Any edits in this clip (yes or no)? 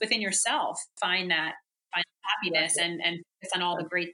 no